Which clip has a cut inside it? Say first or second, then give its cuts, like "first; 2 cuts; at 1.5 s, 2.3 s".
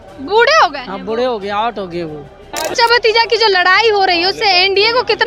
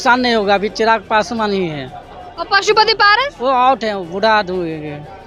first; 1 cut; at 2.6 s